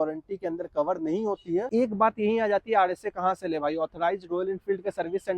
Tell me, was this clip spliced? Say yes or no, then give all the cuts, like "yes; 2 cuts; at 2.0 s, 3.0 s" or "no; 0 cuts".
yes; 1 cut; at 1.7 s